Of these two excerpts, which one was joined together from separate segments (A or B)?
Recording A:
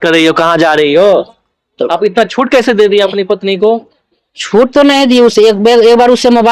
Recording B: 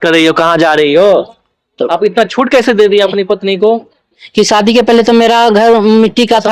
B